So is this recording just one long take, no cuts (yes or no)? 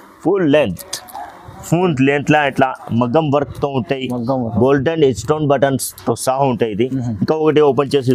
yes